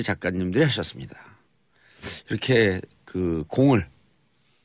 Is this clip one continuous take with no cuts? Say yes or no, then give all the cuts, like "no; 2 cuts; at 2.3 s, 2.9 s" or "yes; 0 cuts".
no; 1 cut; at 3.7 s